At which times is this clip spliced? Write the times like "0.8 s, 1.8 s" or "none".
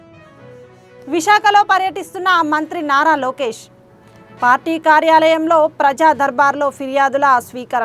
0.9 s